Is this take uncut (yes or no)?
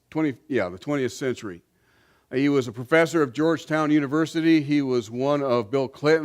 no